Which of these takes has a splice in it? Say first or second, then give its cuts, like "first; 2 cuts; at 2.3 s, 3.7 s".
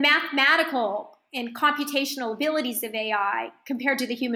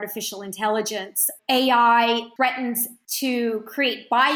second; 2 cuts; at 1.3 s, 2.5 s